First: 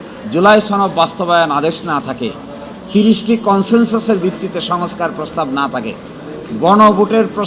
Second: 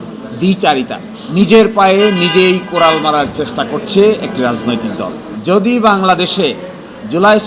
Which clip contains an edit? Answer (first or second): second